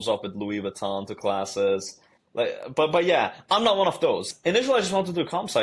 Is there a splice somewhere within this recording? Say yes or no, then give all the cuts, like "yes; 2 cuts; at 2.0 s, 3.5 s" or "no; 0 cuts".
yes; 1 cut; at 4.3 s